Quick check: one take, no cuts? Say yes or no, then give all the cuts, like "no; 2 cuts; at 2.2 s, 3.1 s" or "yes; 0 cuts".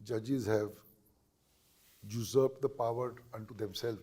yes; 0 cuts